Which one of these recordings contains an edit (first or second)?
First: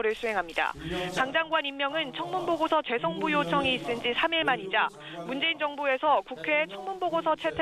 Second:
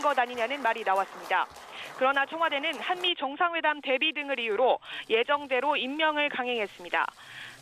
second